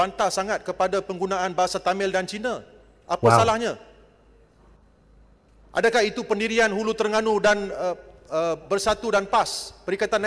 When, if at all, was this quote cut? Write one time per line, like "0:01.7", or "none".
none